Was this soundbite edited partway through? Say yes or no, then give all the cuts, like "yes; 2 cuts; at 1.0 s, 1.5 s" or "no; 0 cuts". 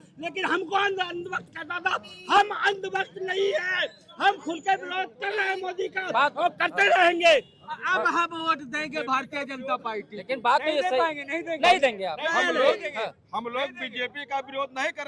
no; 0 cuts